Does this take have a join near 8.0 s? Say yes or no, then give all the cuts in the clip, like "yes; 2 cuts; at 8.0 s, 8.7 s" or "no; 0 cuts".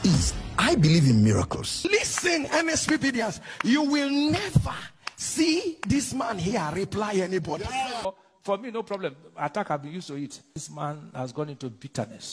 yes; 2 cuts; at 1.9 s, 8.0 s